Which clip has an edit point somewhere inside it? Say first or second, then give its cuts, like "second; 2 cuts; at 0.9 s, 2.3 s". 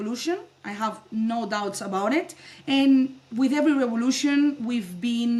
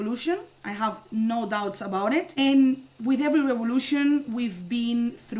second; 1 cut; at 2.3 s